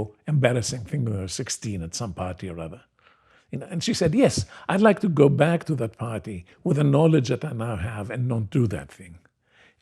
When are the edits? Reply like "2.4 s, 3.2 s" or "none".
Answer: none